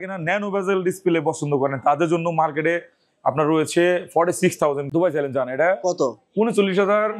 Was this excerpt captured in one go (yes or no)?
yes